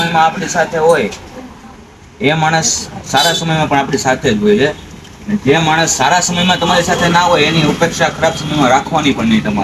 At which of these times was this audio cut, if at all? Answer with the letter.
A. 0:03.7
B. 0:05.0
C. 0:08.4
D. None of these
D